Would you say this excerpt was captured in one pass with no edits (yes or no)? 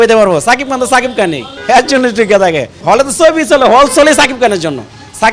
no